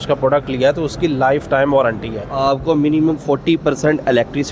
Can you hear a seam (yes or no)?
yes